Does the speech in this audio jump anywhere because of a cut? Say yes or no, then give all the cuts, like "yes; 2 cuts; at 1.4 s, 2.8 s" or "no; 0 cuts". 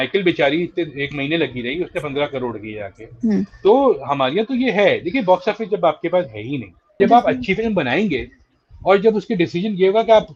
yes; 1 cut; at 7.0 s